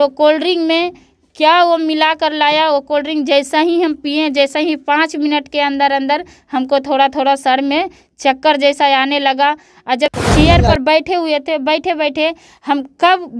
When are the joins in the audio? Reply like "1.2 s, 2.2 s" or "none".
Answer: 10.2 s